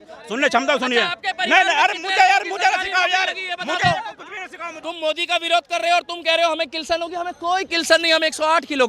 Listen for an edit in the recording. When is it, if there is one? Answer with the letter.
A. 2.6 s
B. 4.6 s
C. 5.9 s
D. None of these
B